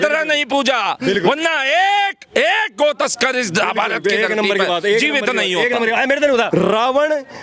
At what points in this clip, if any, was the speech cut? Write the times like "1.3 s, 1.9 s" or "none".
none